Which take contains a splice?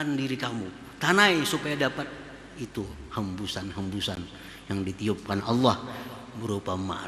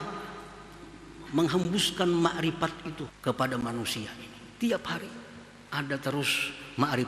second; 1 cut; at 3.1 s

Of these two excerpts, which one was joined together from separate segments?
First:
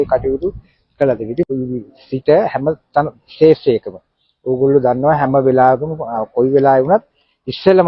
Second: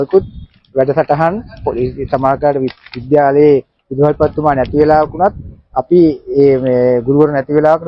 first; 1 cut; at 1.5 s

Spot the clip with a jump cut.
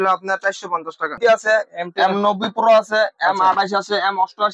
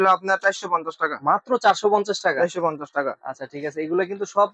first; 1 cut; at 1.2 s

